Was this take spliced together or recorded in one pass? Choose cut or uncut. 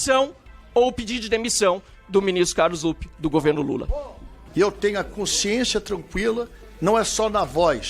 uncut